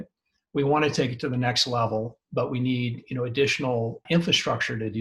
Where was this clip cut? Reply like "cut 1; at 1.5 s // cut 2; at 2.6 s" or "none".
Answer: cut 1; at 4.0 s